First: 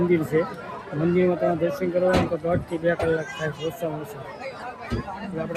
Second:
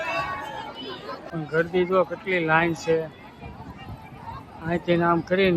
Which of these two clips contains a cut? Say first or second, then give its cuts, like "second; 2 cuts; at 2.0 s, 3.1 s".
second; 1 cut; at 1.2 s